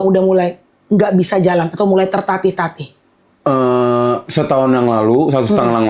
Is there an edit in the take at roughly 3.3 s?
no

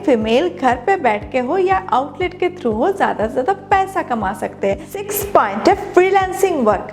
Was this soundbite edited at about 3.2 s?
no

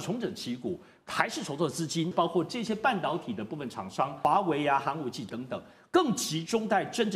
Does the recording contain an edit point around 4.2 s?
yes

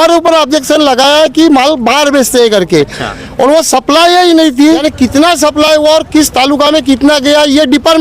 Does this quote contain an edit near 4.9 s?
yes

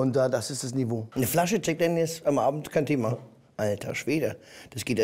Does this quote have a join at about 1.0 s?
yes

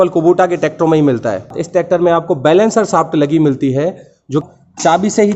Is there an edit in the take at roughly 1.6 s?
yes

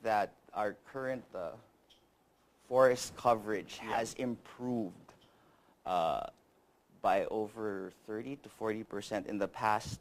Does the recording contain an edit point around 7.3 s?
yes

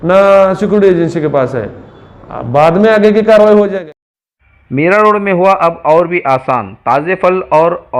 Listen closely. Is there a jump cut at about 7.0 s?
no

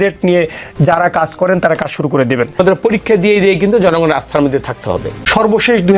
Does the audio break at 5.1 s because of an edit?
yes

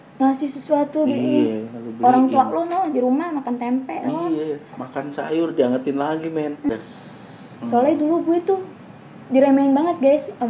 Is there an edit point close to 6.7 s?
yes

